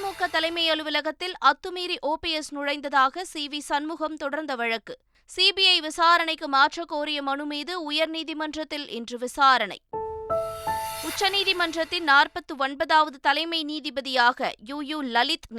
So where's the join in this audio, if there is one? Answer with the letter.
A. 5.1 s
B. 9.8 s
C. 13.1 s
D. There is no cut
B